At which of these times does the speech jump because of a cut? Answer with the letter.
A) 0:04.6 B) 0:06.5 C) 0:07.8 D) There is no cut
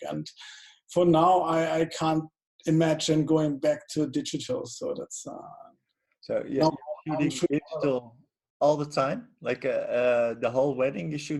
D